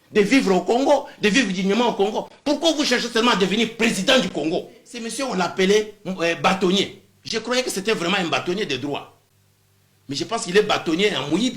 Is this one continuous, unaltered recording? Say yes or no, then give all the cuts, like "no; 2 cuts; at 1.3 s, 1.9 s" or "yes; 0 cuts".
no; 1 cut; at 5.0 s